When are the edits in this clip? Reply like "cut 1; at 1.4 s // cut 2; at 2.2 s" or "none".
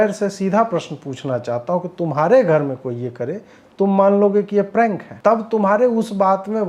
cut 1; at 5.1 s